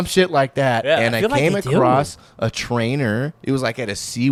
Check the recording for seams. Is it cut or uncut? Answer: uncut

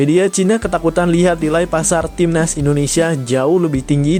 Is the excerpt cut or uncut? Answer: uncut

